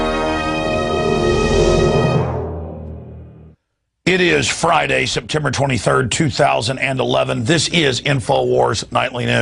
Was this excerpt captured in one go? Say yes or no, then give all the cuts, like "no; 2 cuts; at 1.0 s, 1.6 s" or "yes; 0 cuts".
yes; 0 cuts